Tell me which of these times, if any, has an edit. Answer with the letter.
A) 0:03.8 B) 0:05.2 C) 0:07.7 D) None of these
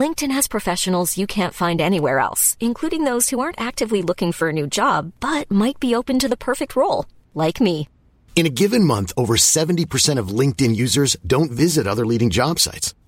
D